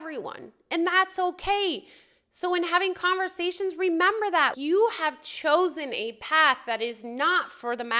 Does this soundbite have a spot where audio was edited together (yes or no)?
no